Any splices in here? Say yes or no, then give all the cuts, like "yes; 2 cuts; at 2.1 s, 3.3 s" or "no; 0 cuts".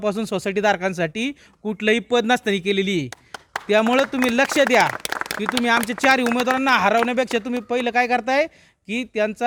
no; 0 cuts